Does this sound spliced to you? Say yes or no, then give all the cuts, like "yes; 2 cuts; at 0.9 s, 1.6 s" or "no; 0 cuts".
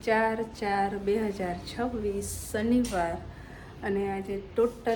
no; 0 cuts